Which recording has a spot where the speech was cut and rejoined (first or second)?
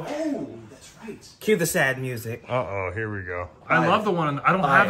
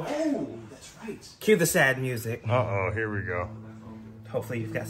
first